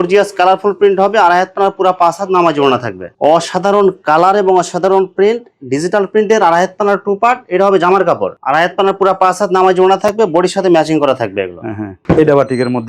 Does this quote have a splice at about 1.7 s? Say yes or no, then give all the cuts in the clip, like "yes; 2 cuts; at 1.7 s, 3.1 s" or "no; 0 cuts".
no; 3 cuts; at 3.2 s, 8.3 s, 12.0 s